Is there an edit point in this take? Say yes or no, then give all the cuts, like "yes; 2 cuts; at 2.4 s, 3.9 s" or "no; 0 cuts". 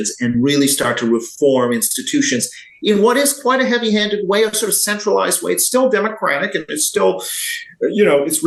no; 0 cuts